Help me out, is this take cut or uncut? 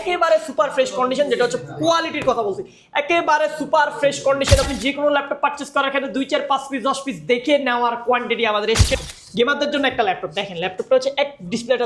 cut